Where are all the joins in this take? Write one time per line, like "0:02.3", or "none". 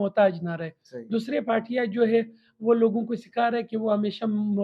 none